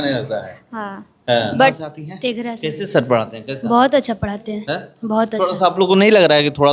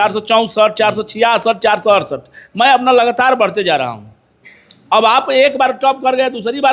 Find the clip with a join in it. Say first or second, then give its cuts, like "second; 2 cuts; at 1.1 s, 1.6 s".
first; 1 cut; at 1.8 s